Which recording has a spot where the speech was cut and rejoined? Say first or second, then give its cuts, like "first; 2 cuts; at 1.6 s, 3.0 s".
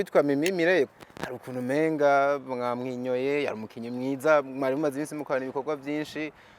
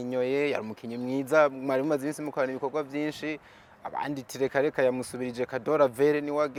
first; 1 cut; at 0.9 s